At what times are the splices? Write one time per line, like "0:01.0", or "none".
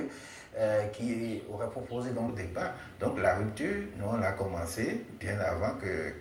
none